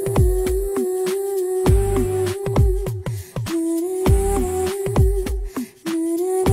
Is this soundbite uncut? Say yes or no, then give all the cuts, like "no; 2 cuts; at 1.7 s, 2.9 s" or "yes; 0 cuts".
yes; 0 cuts